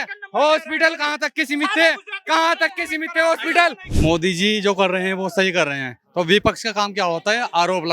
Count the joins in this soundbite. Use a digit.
1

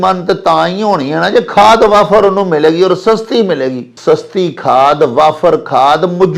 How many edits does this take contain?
1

